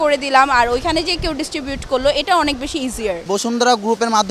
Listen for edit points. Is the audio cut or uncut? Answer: cut